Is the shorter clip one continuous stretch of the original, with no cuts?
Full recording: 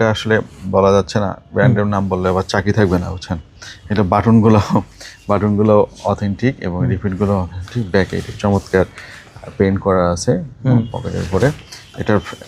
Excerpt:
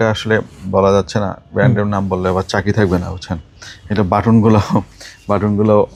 yes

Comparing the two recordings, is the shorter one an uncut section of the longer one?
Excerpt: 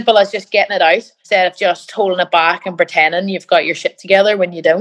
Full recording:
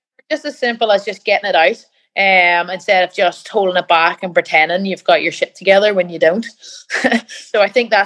no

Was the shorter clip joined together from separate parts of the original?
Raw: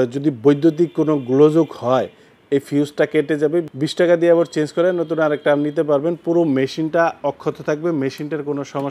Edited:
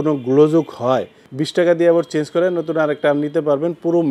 yes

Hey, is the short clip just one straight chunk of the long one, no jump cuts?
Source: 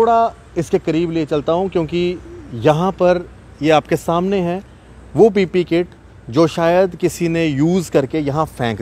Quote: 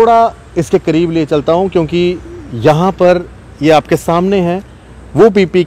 yes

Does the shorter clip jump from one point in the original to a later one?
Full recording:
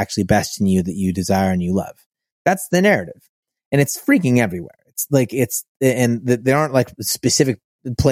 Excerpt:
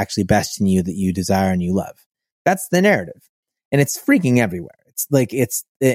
no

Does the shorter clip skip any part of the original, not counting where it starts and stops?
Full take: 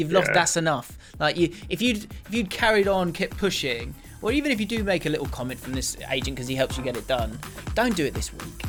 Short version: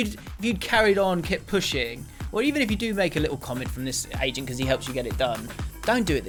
no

